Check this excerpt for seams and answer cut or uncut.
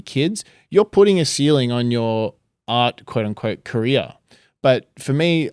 uncut